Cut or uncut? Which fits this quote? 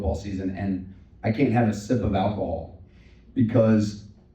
uncut